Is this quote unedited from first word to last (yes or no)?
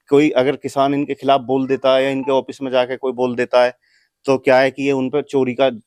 yes